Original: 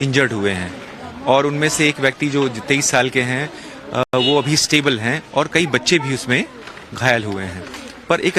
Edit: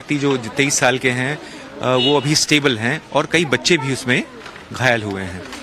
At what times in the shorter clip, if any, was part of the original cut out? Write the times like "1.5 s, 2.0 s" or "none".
1.9 s